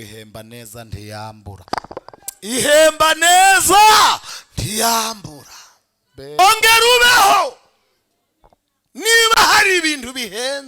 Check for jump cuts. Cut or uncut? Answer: cut